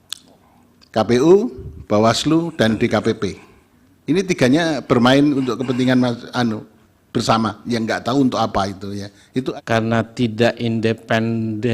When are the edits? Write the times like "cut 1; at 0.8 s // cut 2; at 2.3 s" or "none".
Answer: cut 1; at 9.5 s